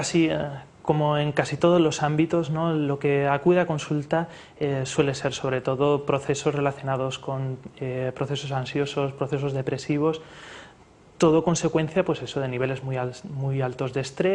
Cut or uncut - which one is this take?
uncut